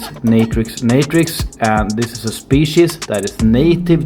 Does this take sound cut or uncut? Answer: uncut